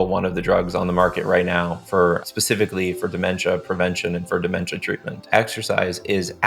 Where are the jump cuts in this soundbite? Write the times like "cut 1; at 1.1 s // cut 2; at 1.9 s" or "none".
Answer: cut 1; at 2.2 s // cut 2; at 5.3 s